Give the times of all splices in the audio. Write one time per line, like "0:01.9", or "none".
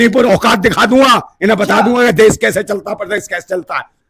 none

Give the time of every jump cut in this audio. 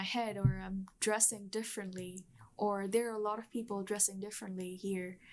none

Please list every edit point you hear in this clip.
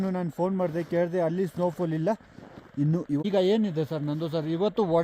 0:03.2

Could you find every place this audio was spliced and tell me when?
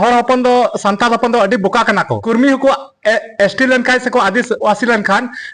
0:02.2

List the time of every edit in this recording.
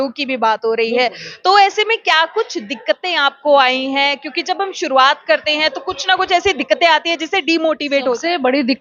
none

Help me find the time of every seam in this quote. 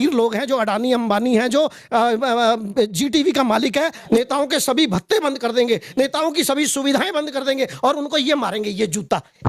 0:04.0

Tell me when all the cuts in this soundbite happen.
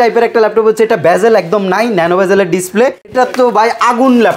0:03.1

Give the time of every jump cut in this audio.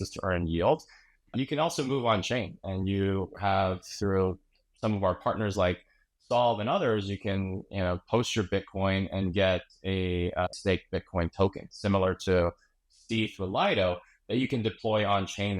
0:01.3
0:10.5

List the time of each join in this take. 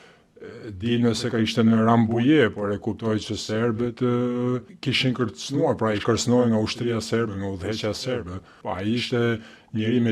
0:04.7
0:08.6

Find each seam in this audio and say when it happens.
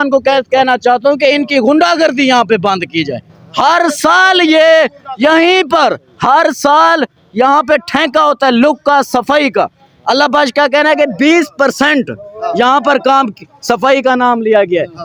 none

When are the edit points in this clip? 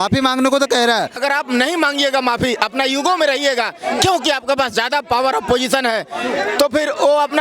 0:01.2

